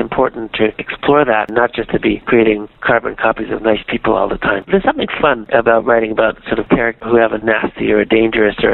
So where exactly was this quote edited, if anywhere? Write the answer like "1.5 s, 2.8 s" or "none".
1.5 s, 2.8 s, 4.7 s